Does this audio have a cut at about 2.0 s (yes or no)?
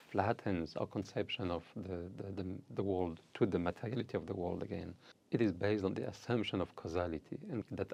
no